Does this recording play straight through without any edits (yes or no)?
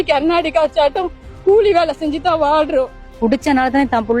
no